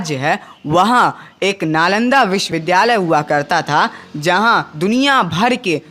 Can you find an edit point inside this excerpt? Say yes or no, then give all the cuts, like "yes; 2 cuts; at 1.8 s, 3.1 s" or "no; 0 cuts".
yes; 1 cut; at 2.5 s